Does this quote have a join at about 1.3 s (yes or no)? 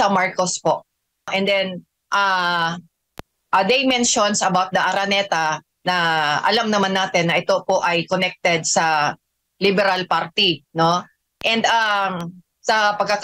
yes